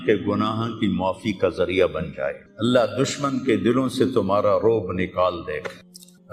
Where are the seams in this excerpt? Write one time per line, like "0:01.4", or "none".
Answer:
0:02.4